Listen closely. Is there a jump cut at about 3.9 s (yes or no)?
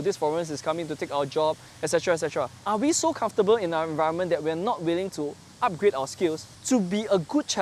no